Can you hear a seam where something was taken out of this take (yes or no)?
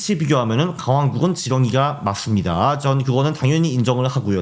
no